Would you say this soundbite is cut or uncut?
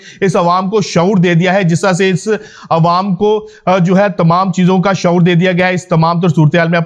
uncut